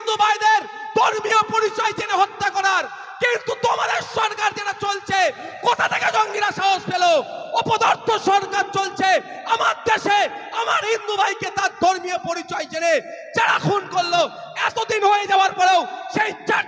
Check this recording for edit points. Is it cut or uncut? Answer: uncut